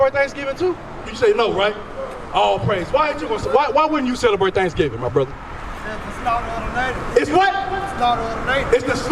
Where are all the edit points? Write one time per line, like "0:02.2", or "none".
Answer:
0:01.1